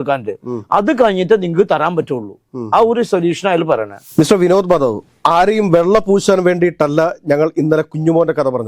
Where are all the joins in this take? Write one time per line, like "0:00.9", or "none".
0:04.1

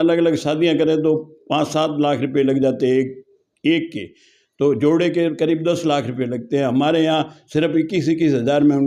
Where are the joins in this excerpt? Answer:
none

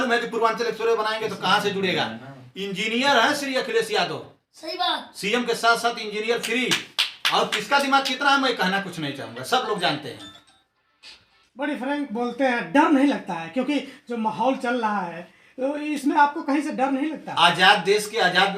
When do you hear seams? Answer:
none

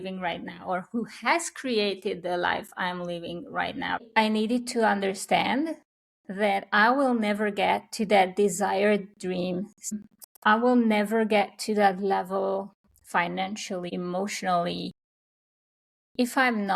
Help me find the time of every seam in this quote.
0:04.1
0:10.0
0:13.9

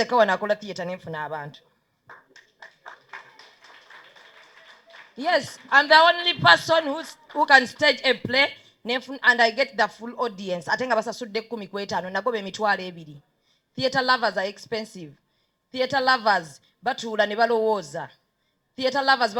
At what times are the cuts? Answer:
none

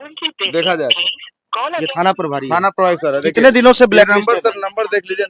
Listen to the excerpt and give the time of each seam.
none

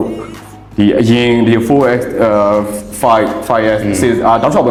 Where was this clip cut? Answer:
none

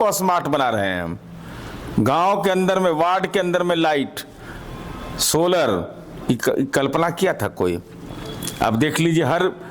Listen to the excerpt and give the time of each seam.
none

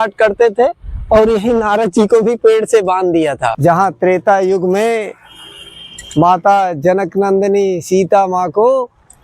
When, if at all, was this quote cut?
0:03.5

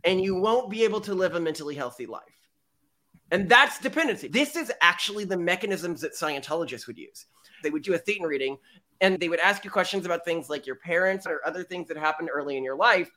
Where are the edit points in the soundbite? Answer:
0:04.3
0:11.3

